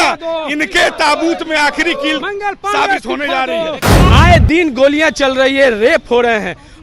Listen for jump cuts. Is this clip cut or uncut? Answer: cut